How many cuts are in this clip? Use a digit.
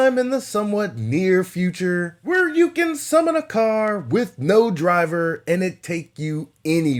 0